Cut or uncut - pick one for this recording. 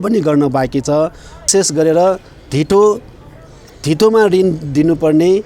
cut